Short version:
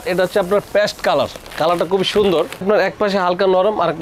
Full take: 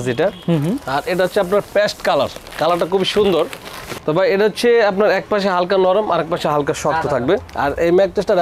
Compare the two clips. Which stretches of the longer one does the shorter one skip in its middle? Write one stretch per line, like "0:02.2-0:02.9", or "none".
0:03.6-0:04.9